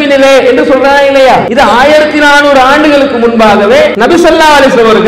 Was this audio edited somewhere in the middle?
yes; 2 cuts; at 1.5 s, 3.9 s

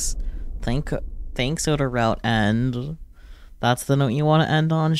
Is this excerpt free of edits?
yes; 0 cuts

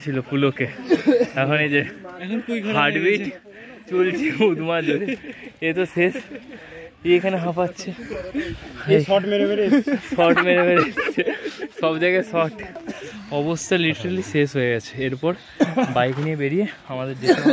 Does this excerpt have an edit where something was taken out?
no; 0 cuts

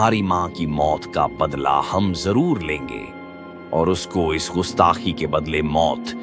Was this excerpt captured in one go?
yes; 0 cuts

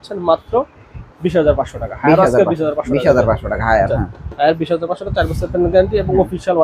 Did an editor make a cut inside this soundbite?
no; 0 cuts

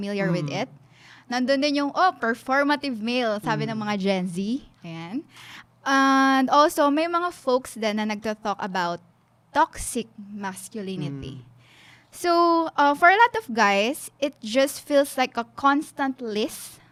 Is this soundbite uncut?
yes; 0 cuts

